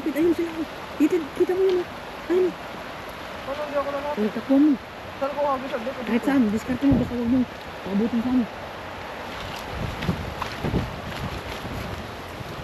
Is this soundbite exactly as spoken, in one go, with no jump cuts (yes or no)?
yes